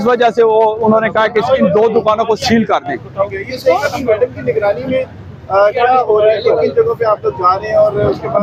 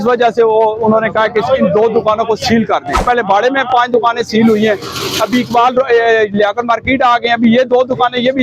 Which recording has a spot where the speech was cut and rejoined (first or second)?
second